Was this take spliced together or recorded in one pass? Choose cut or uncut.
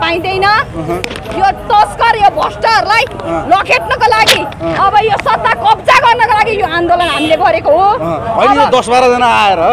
uncut